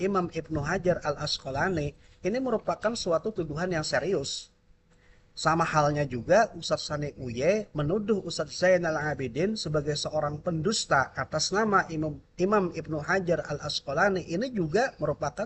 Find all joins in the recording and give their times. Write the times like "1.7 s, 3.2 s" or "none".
none

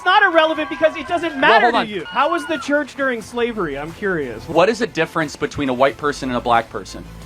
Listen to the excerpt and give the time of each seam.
2.0 s, 4.5 s

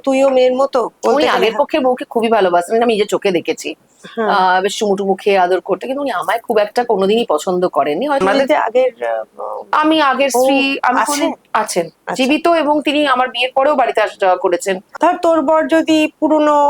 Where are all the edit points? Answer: 8.2 s, 14.9 s

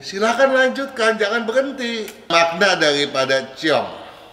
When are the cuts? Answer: 2.3 s

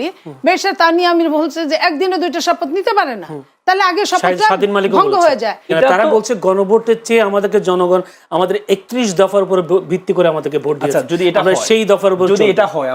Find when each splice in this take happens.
5.7 s

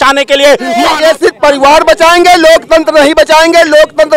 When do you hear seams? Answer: 1.0 s

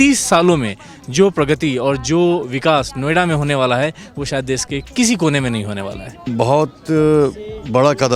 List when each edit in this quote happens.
6.3 s

